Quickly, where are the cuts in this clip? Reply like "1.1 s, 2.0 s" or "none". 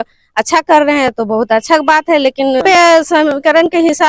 2.6 s